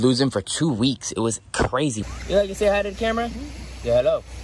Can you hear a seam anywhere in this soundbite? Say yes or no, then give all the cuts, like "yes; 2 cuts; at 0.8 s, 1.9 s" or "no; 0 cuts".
yes; 1 cut; at 2.0 s